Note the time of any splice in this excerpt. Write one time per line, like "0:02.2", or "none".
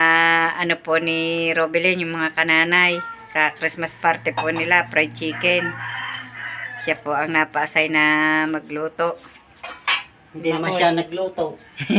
none